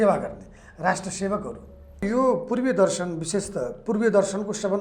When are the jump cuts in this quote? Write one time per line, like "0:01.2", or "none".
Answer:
0:02.0